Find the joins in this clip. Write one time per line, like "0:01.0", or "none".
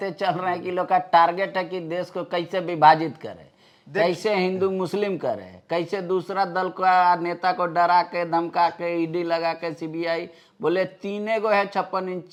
none